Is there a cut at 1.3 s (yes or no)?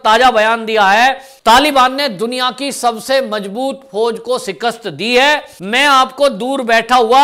yes